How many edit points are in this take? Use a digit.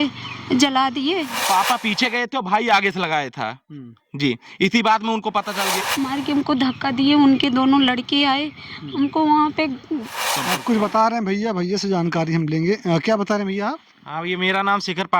3